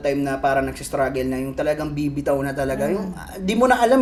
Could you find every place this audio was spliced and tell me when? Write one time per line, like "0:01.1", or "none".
none